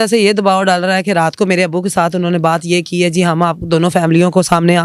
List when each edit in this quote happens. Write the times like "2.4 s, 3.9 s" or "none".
none